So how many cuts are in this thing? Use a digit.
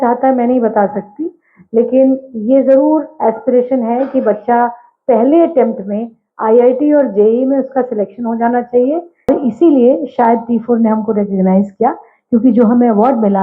1